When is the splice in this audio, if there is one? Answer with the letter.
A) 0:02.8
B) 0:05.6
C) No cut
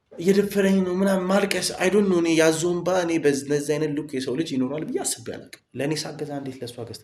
B